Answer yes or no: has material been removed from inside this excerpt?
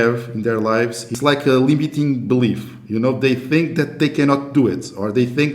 yes